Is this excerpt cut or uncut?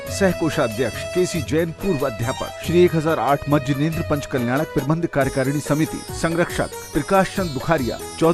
cut